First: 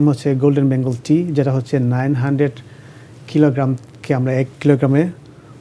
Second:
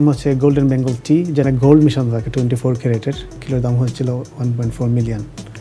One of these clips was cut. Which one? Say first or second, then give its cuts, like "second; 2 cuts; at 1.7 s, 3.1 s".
second; 2 cuts; at 1.4 s, 3.4 s